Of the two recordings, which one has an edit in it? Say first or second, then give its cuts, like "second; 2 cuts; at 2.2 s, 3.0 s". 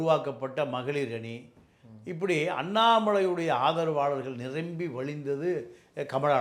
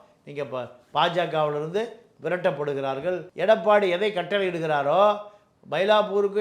second; 1 cut; at 3.3 s